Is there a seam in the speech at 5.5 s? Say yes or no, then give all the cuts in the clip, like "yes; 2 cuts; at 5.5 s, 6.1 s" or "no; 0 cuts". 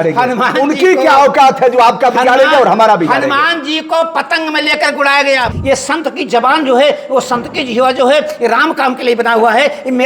yes; 1 cut; at 5.5 s